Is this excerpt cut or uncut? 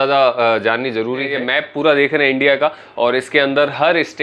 cut